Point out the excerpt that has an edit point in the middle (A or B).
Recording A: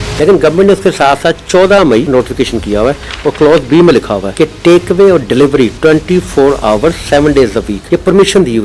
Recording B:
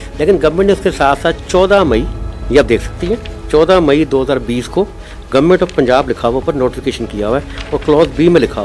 A